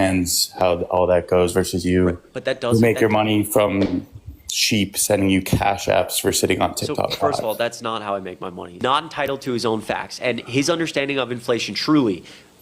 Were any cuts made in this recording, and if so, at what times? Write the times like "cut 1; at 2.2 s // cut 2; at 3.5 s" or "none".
cut 1; at 8.8 s